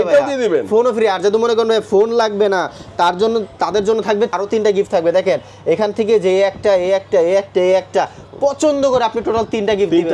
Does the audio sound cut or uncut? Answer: cut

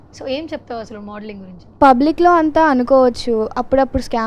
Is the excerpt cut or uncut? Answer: cut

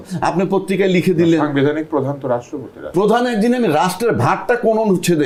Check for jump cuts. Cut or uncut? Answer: uncut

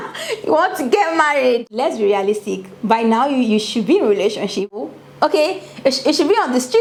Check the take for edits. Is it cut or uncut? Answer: uncut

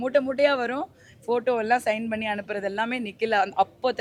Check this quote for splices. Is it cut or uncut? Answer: uncut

